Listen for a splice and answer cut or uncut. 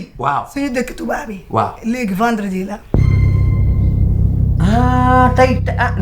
uncut